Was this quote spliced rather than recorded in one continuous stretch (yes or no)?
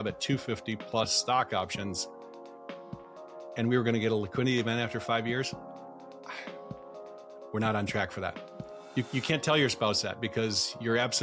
no